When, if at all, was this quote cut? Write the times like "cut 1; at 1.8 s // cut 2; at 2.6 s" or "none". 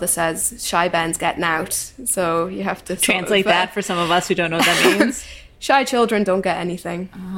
none